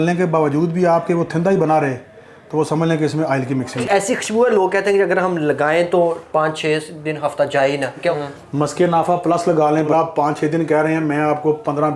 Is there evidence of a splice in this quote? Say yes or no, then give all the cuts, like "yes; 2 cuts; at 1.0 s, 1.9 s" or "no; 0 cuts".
yes; 3 cuts; at 3.7 s, 8.2 s, 9.9 s